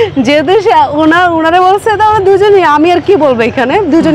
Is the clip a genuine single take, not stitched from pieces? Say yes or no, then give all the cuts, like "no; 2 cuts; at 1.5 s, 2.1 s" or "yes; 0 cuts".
yes; 0 cuts